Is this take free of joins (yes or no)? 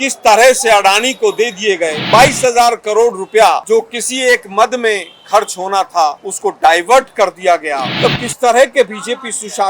no